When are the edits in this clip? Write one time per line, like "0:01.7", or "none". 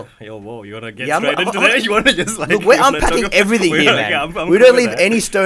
none